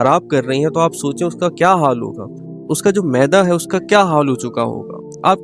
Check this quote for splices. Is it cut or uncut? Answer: uncut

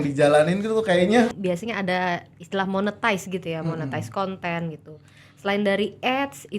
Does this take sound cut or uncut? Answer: cut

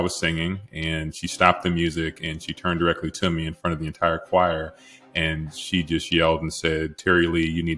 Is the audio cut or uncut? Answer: uncut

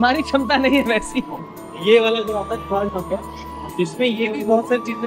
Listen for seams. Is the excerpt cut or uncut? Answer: uncut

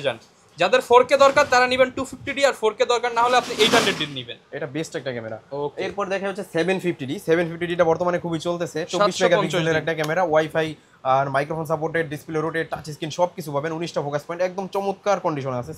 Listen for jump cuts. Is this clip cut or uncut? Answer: uncut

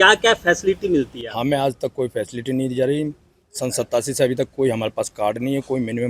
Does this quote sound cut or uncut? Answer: uncut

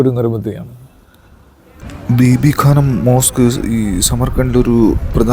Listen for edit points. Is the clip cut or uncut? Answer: cut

